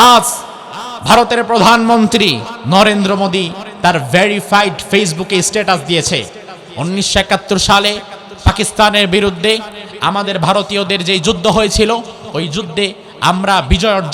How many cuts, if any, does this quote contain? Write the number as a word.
one